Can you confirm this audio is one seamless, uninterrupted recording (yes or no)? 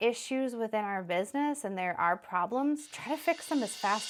yes